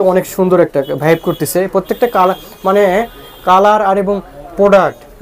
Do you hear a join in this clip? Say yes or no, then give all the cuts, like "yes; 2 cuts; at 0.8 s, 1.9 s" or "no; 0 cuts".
no; 0 cuts